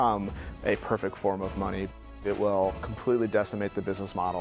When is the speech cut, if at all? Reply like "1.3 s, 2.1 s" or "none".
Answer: 2.2 s